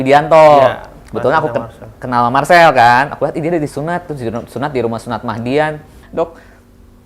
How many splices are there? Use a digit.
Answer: 1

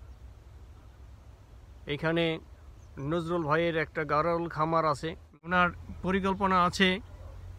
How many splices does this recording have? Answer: 1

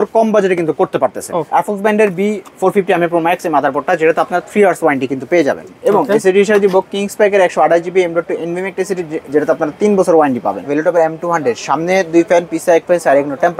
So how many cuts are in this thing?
3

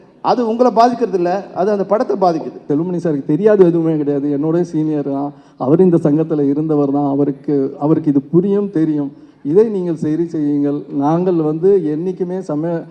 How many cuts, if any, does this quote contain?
1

